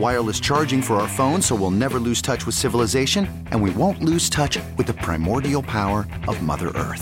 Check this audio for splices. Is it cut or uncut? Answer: uncut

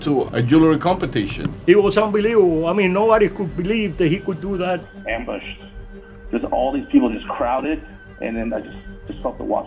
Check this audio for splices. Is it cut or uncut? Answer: cut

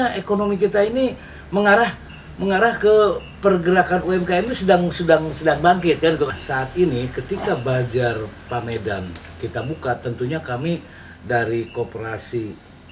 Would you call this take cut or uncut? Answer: cut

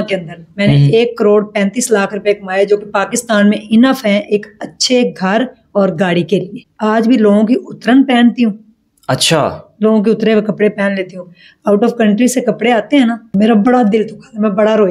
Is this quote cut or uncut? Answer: cut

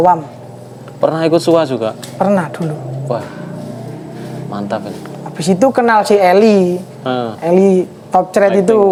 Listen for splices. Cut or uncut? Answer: uncut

